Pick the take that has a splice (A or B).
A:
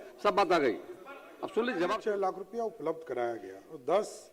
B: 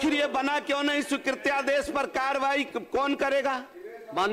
A